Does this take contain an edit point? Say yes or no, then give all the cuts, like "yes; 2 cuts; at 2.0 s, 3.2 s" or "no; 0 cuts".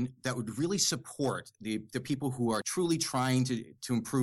yes; 1 cut; at 2.7 s